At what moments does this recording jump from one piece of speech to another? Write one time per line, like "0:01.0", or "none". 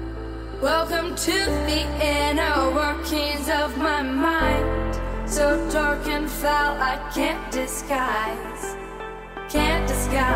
none